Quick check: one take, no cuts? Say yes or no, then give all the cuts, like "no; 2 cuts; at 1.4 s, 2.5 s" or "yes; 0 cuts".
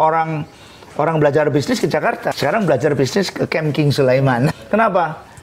no; 2 cuts; at 2.3 s, 4.5 s